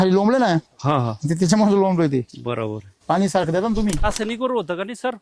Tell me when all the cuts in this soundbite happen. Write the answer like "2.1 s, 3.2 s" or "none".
4.1 s